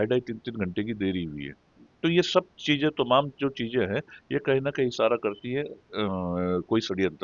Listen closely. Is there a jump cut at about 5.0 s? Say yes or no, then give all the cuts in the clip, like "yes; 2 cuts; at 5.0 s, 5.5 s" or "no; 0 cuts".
no; 0 cuts